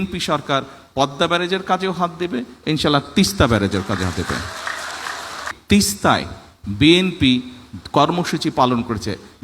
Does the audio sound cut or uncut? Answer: cut